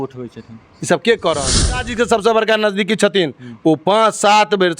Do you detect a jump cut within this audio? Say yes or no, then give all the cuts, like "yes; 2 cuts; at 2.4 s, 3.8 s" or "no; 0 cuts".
yes; 1 cut; at 1.9 s